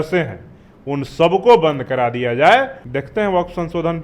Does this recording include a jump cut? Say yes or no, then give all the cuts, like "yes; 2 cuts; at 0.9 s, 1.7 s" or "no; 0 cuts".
yes; 1 cut; at 2.8 s